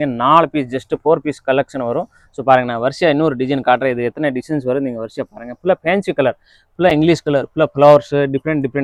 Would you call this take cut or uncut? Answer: uncut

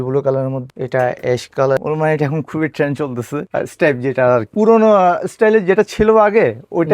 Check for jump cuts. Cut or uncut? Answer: cut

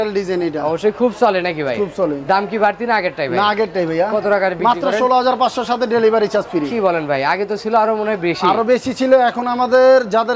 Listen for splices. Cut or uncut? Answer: uncut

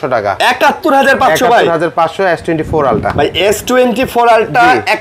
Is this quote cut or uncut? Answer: uncut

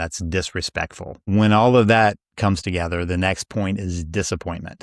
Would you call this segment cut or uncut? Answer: cut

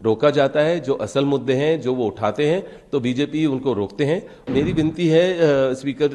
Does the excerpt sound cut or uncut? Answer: cut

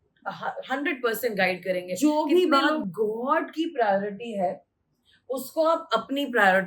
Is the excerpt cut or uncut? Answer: cut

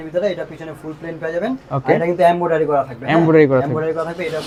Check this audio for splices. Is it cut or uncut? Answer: uncut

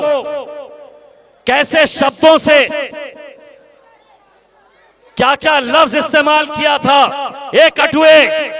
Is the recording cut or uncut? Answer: uncut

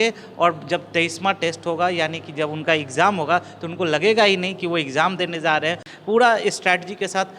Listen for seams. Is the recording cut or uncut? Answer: cut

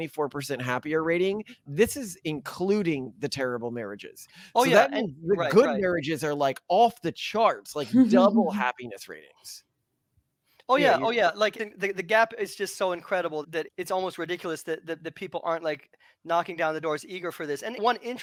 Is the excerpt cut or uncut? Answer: uncut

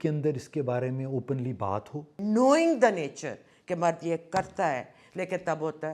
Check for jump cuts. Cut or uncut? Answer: cut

